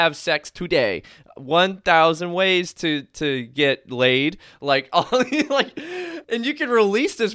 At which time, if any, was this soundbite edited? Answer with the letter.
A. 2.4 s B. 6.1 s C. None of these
B